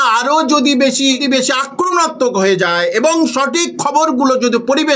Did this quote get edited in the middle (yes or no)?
yes